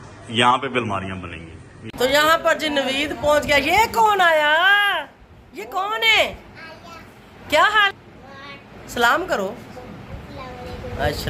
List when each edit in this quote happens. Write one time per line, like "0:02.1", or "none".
0:01.9
0:07.9